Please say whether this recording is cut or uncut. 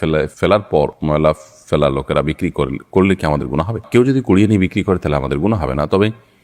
uncut